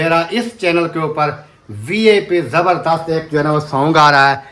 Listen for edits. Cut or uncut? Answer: uncut